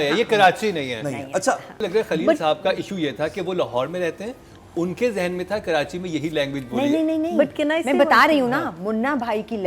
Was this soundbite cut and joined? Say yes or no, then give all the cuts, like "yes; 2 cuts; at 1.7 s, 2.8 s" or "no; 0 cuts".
yes; 1 cut; at 1.8 s